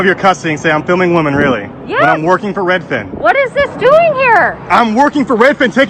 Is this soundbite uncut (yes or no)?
yes